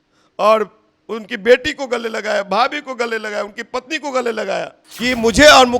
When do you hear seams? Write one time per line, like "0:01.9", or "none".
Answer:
0:04.8